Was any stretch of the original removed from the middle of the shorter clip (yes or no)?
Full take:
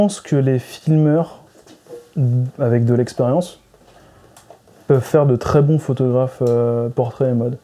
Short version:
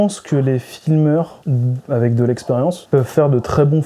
yes